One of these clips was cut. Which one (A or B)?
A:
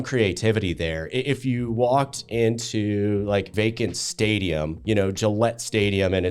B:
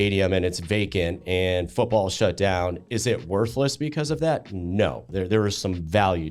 A